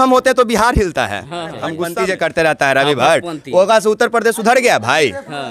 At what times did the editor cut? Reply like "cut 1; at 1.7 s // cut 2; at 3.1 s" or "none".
cut 1; at 1.8 s

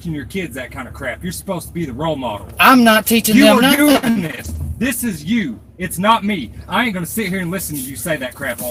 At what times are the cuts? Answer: none

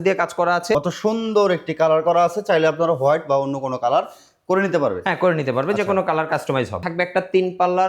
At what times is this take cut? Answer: cut 1; at 0.7 s // cut 2; at 6.8 s

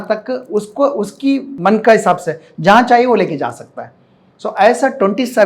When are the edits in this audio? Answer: cut 1; at 1.5 s

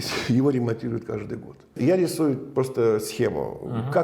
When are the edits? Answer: cut 1; at 1.7 s

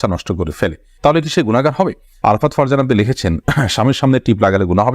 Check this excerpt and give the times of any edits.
cut 1; at 2.1 s

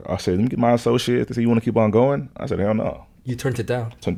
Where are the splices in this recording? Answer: none

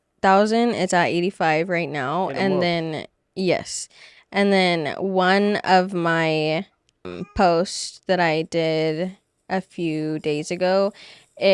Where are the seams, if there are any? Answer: cut 1; at 7.0 s

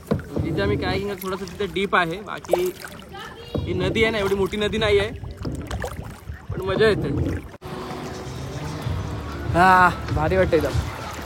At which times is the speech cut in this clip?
cut 1; at 7.6 s

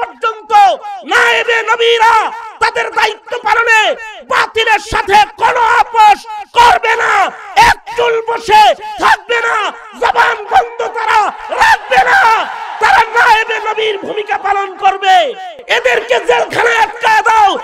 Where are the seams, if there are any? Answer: cut 1; at 15.5 s

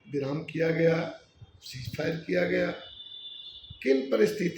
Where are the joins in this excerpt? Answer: none

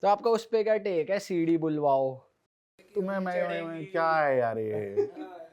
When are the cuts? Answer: cut 1; at 2.7 s

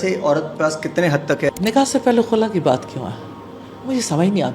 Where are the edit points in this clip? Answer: cut 1; at 1.5 s

